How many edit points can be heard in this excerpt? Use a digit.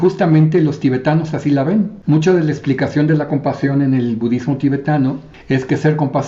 2